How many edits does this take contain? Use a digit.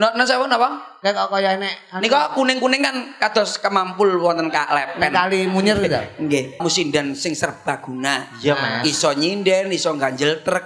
1